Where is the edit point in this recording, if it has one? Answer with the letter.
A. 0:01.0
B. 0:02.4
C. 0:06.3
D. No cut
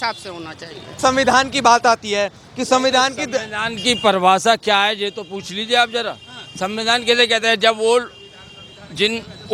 A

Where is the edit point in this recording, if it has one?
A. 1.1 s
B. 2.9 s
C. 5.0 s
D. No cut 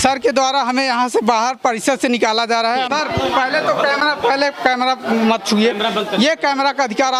B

